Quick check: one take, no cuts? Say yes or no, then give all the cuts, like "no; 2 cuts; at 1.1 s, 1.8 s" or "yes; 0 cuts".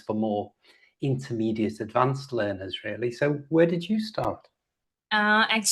yes; 0 cuts